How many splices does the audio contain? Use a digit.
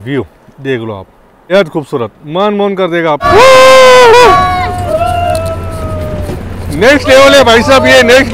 2